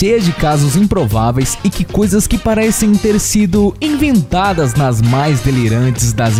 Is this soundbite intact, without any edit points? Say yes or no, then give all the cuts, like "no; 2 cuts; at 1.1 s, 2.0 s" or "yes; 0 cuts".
yes; 0 cuts